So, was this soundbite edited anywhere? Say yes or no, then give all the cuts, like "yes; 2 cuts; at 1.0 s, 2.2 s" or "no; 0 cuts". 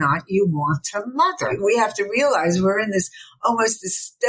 yes; 1 cut; at 1.5 s